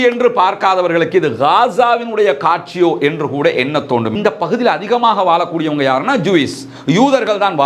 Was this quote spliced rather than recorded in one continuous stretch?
yes; 1 cut; at 4.1 s

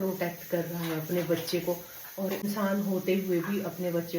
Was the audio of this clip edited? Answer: yes; 1 cut; at 2.4 s

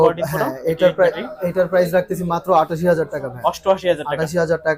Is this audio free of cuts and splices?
yes; 0 cuts

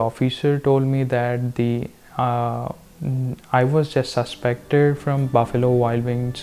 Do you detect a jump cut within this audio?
no; 0 cuts

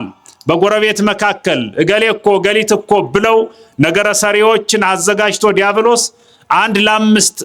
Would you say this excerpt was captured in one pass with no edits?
yes; 0 cuts

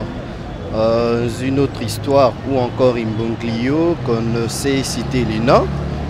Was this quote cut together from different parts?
no; 0 cuts

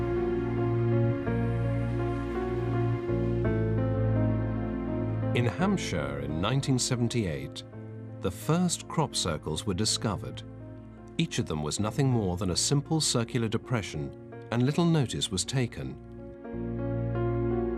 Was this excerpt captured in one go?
no; 1 cut; at 3.9 s

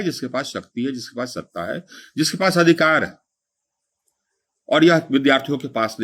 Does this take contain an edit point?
no; 0 cuts

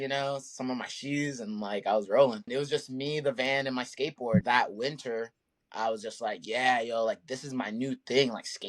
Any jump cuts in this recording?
yes; 2 cuts; at 2.5 s, 4.4 s

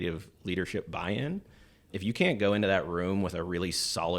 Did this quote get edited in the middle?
yes; 1 cut; at 1.9 s

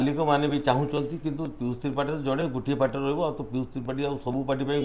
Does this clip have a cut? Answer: no; 0 cuts

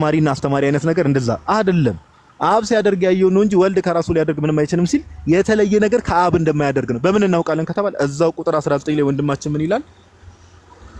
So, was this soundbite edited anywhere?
no; 0 cuts

